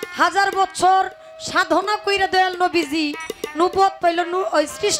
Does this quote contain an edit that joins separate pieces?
no; 0 cuts

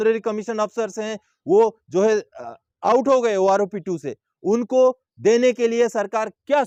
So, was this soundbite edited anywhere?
no; 0 cuts

